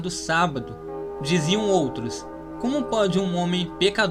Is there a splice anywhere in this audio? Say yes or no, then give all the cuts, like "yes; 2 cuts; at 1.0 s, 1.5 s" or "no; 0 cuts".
no; 0 cuts